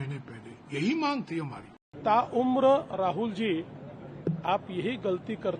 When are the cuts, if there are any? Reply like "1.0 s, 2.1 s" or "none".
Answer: 2.0 s